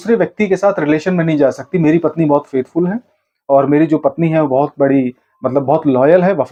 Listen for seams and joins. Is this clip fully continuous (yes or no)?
yes